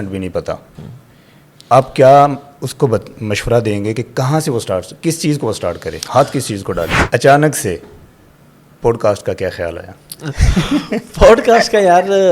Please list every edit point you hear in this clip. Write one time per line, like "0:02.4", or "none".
0:06.9